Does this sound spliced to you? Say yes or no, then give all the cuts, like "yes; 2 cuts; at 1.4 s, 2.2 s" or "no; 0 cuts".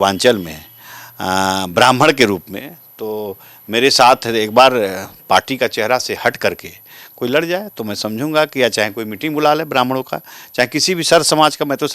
no; 0 cuts